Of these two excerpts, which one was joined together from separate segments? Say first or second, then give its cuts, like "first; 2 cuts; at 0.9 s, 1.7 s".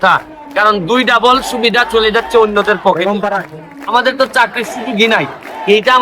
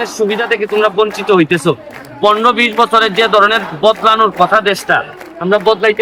first; 1 cut; at 3.6 s